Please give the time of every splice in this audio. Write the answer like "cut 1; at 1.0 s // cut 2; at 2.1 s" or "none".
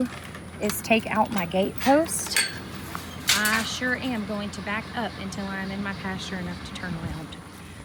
none